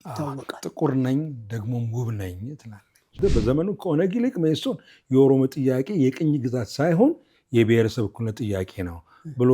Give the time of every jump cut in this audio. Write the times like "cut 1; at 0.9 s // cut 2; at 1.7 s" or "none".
cut 1; at 3.2 s